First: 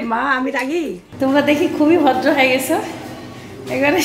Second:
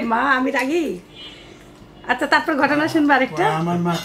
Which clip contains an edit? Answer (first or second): first